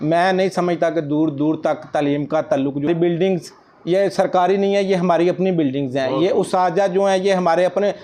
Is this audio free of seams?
no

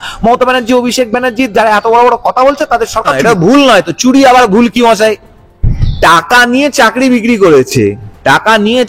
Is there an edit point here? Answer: yes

